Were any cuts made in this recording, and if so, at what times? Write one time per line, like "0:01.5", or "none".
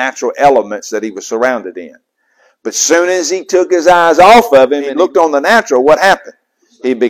0:04.8